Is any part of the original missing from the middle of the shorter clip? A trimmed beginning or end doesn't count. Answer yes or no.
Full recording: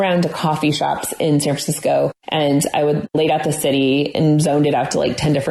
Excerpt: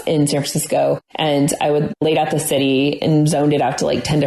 no